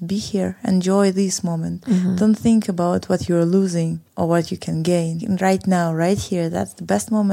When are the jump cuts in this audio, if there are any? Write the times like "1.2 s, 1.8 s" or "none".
4.0 s, 5.2 s